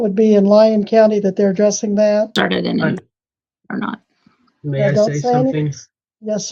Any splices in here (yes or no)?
yes